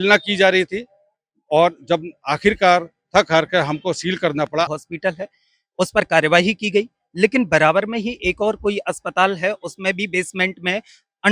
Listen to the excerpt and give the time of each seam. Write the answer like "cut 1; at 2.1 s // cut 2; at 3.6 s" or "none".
cut 1; at 4.7 s